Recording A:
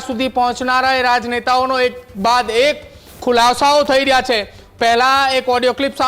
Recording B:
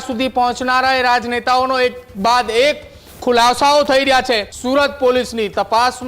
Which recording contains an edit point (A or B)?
B